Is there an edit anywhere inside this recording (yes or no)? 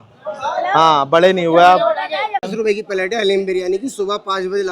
yes